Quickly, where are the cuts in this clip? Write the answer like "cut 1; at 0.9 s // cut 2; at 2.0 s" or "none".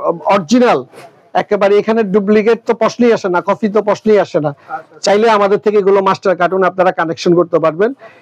none